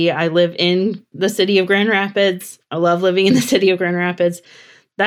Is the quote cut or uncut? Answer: uncut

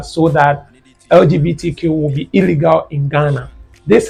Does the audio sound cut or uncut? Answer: uncut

